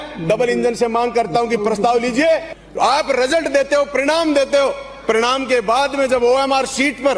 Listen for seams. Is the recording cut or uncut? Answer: cut